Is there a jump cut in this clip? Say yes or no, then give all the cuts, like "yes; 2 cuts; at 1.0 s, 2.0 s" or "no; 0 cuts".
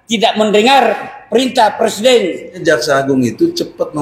yes; 1 cut; at 2.6 s